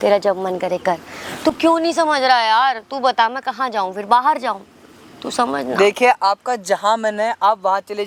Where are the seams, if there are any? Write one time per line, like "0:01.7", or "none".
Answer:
none